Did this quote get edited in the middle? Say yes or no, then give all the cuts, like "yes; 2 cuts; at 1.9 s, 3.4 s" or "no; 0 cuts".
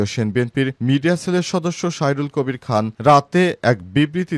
no; 0 cuts